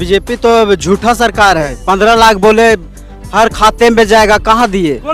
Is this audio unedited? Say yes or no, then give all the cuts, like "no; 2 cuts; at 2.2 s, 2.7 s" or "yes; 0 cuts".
no; 1 cut; at 1.7 s